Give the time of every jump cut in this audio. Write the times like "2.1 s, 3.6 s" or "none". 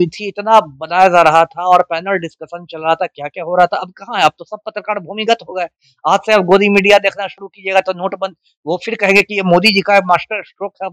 none